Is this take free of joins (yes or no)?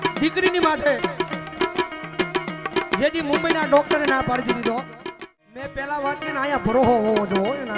no